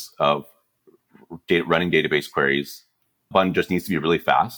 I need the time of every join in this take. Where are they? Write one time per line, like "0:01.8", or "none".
0:03.3